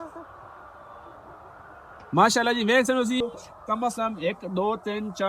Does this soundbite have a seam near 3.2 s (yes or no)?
yes